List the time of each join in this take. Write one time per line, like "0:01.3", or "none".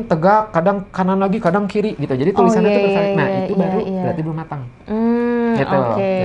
none

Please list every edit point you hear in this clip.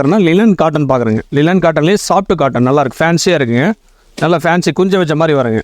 none

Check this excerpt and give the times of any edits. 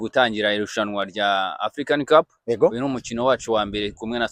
none

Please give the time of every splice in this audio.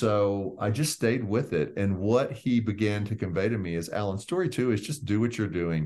none

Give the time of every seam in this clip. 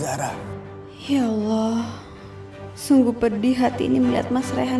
0:01.0

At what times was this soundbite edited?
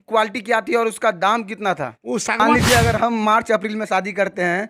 0:02.4

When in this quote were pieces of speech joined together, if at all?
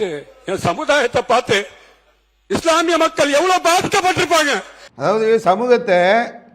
0:04.9

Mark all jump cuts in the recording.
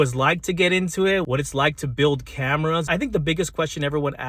0:01.3
0:02.8

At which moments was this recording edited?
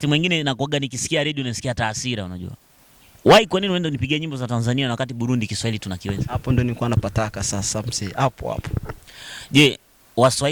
none

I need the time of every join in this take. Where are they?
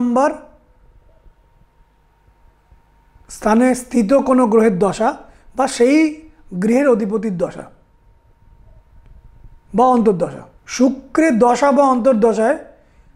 none

